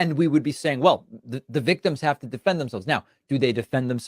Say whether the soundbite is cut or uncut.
cut